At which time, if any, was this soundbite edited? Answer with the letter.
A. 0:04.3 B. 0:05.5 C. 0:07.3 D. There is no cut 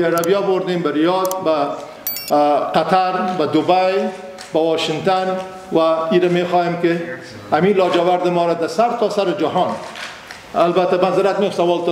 D